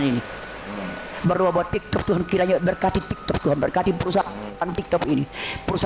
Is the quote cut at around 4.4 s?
yes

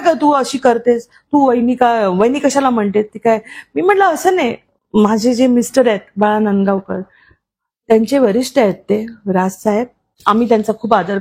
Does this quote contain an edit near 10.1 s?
yes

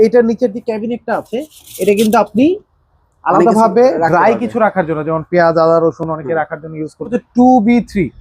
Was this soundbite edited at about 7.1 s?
yes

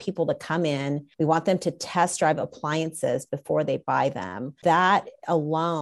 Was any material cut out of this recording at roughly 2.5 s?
no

